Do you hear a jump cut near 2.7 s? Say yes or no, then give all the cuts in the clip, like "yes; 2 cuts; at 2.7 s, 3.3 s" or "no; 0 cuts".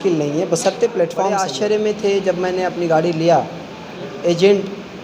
no; 2 cuts; at 1.5 s, 4.1 s